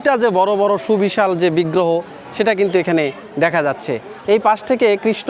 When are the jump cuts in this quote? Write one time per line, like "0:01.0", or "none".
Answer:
none